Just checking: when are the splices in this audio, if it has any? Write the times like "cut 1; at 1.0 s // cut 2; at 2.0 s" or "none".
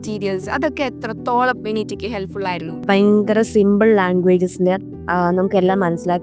cut 1; at 2.8 s // cut 2; at 4.9 s

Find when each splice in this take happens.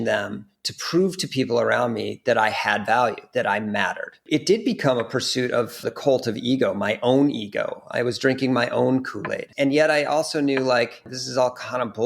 cut 1; at 4.2 s // cut 2; at 5.8 s // cut 3; at 9.5 s // cut 4; at 11.2 s

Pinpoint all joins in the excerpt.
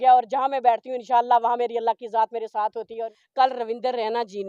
cut 1; at 3.1 s

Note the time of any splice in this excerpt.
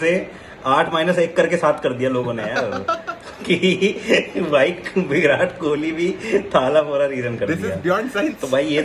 none

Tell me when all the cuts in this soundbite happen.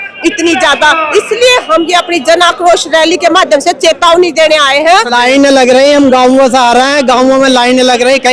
cut 1; at 5.1 s

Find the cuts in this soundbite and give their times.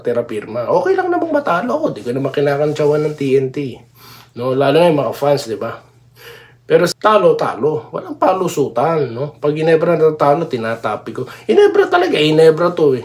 cut 1; at 6.9 s

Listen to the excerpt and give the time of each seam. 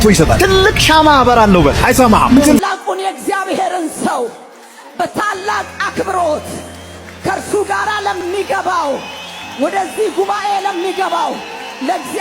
cut 1; at 2.6 s

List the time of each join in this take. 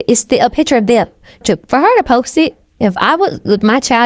cut 1; at 1.4 s

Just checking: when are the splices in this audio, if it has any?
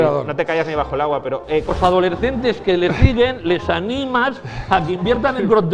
cut 1; at 1.7 s

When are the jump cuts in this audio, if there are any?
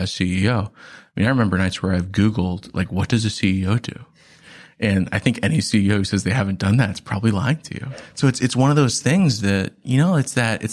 cut 1; at 8.0 s

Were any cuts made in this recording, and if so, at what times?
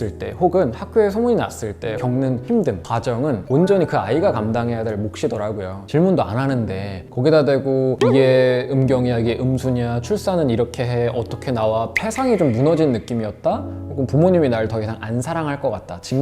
cut 1; at 1.9 s // cut 2; at 3.4 s // cut 3; at 5.8 s // cut 4; at 11.9 s

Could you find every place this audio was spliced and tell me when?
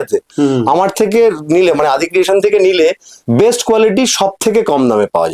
cut 1; at 3.1 s

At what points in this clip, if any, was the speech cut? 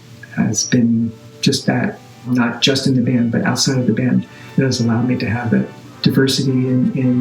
cut 1; at 1.3 s // cut 2; at 2.3 s

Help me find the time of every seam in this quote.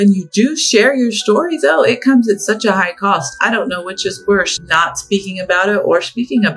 cut 1; at 4.6 s

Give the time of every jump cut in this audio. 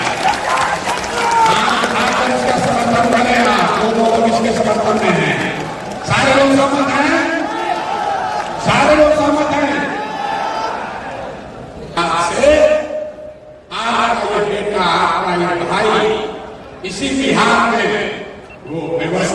cut 1; at 11.9 s

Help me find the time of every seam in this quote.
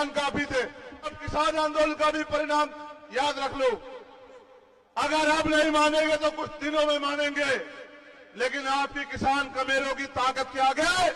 cut 1; at 1.2 s

